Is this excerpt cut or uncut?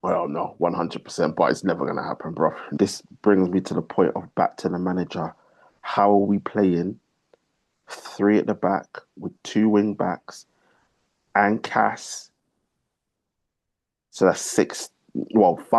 cut